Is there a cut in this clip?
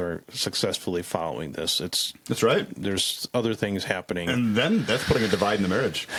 no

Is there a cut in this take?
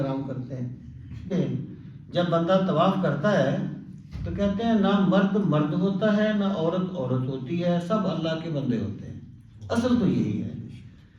yes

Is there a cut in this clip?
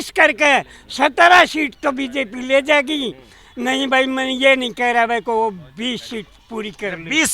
yes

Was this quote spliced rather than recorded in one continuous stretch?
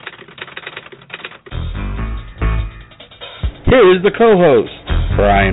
yes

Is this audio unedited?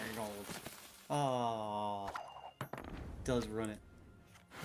yes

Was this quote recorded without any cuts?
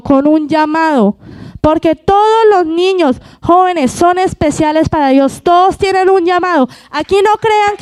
yes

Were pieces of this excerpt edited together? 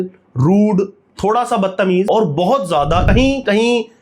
yes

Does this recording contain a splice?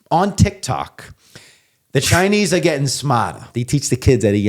yes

